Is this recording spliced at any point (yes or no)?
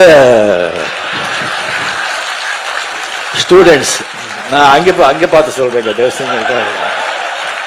no